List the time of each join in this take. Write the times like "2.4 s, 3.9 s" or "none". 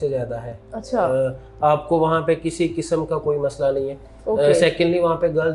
none